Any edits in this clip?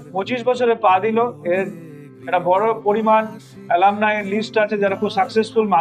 no; 0 cuts

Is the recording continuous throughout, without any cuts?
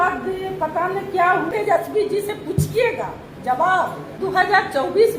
no; 2 cuts; at 1.5 s, 4.1 s

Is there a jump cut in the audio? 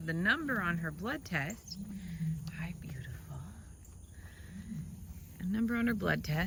no; 0 cuts

